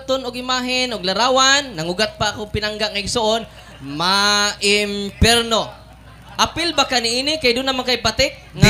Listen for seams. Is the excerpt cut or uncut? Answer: uncut